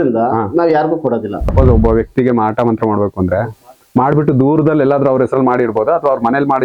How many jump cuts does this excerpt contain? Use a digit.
1